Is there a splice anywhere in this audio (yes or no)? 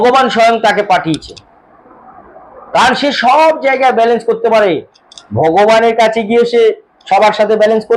no